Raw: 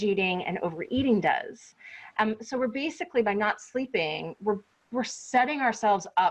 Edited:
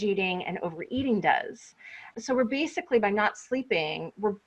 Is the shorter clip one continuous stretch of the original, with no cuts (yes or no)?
no